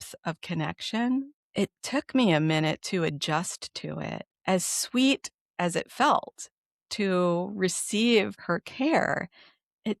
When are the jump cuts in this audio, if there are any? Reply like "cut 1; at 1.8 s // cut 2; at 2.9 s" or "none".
cut 1; at 1.4 s // cut 2; at 4.3 s // cut 3; at 8.4 s